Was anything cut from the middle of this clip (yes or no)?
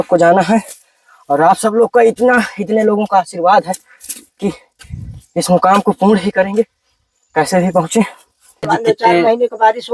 yes